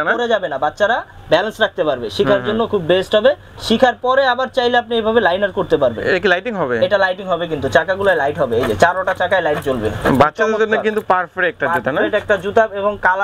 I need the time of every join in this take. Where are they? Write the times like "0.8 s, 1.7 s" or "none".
none